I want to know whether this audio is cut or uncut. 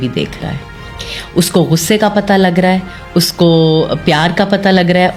uncut